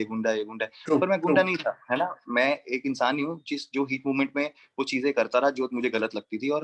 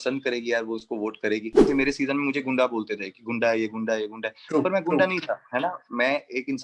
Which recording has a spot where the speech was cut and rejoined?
second; 1 cut; at 1.6 s

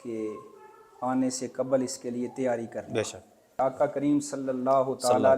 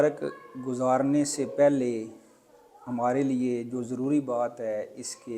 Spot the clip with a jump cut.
first; 1 cut; at 3.6 s

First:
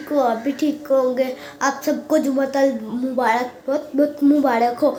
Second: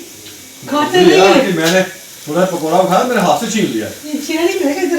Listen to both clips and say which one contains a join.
second; 1 cut; at 4.0 s

